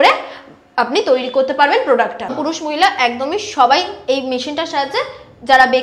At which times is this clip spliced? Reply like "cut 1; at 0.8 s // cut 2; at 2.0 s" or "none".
cut 1; at 2.4 s